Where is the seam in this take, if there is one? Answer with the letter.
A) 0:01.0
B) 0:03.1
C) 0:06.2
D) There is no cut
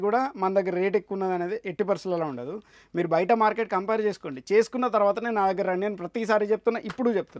D